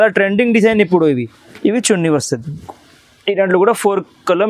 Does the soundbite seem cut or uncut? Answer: cut